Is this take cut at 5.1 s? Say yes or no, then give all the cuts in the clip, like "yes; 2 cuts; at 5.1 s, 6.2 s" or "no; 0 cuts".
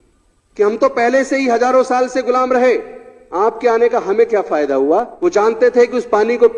yes; 1 cut; at 5.1 s